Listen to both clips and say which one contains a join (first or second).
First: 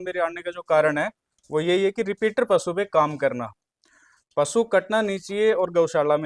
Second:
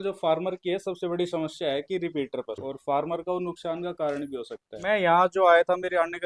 second